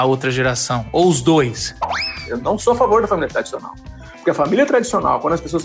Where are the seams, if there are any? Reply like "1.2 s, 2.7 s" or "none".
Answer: 2.2 s